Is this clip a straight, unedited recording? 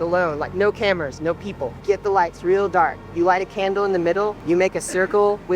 no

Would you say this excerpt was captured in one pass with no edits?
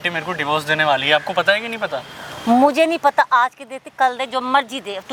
yes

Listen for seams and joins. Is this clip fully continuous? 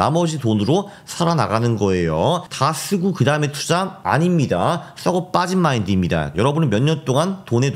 no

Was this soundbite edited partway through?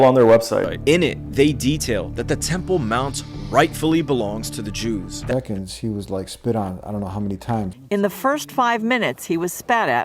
yes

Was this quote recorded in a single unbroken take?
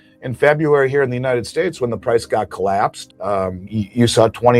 no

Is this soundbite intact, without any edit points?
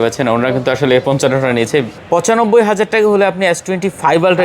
no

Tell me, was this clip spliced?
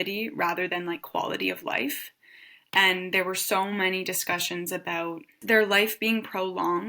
yes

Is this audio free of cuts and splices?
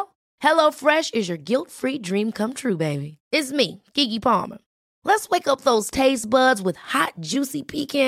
yes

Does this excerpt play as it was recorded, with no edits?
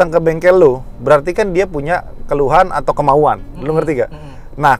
yes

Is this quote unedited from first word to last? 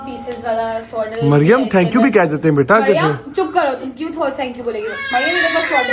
yes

